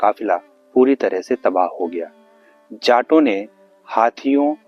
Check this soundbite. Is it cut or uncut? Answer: uncut